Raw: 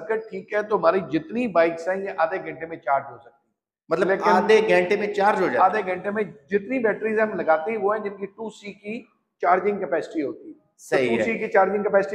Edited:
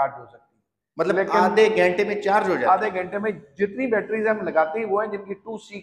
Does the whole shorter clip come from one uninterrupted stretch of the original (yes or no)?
yes